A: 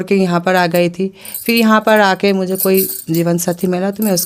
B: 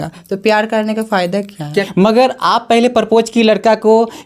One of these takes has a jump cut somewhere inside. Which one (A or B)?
B